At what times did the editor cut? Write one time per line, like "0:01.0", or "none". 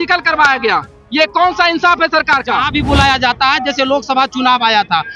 0:02.6